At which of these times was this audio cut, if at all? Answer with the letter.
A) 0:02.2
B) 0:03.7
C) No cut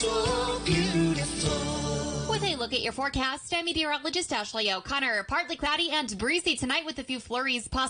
A